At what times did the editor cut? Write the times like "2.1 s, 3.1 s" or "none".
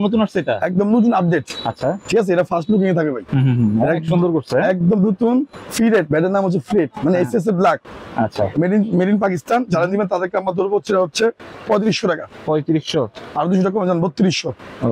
none